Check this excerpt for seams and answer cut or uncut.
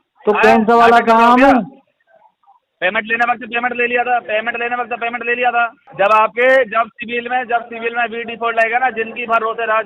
cut